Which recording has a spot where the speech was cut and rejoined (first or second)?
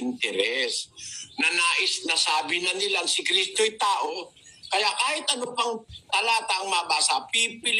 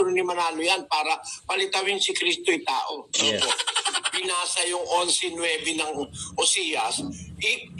second